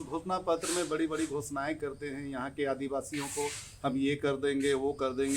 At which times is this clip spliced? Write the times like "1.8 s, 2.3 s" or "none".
none